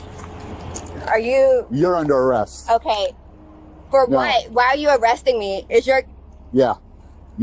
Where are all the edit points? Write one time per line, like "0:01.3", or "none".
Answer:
none